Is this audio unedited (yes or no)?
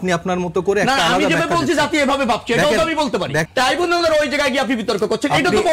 no